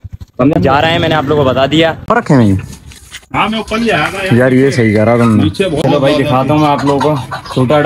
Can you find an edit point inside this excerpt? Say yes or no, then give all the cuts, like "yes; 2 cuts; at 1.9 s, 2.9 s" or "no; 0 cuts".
yes; 2 cuts; at 2.1 s, 5.8 s